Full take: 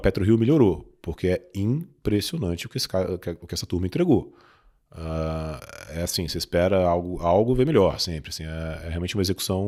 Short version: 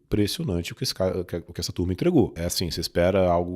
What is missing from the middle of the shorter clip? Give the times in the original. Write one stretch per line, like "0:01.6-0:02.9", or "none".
0:04.3-0:05.9